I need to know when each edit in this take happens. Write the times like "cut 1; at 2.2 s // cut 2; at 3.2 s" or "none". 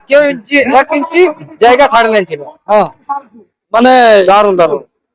none